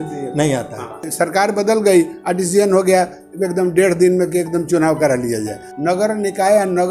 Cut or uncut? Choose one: cut